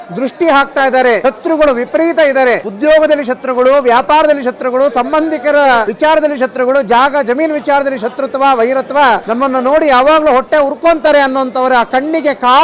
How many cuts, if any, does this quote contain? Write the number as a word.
four